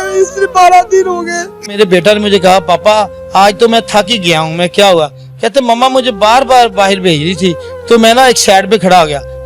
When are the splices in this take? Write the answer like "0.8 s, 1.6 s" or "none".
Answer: 1.8 s